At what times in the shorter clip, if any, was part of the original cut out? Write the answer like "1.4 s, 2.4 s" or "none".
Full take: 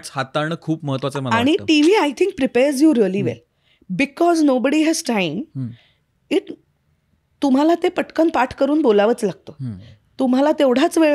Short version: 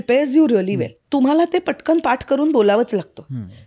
0.9 s